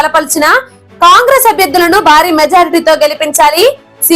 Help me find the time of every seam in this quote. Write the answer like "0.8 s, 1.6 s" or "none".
none